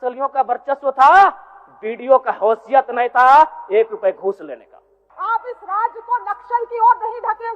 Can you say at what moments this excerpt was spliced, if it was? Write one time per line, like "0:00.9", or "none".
0:05.0